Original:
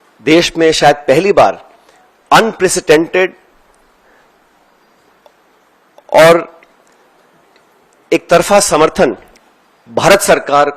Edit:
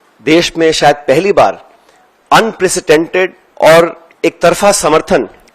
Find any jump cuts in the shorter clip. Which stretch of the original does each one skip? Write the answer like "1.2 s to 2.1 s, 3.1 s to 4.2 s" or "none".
3.4 s to 5.9 s, 6.6 s to 7.9 s